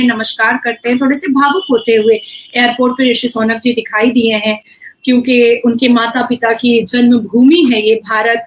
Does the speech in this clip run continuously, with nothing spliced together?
yes; 0 cuts

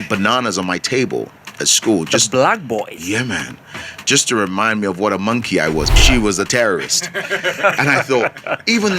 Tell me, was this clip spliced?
yes; 1 cut; at 5.9 s

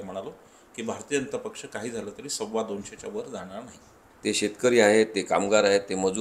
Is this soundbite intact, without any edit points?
no; 1 cut; at 4.0 s

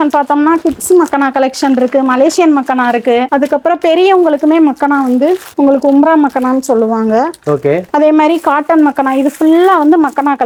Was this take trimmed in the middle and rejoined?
no; 0 cuts

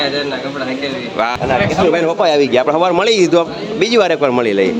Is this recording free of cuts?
no; 1 cut; at 1.3 s

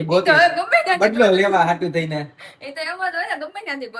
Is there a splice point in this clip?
no; 0 cuts

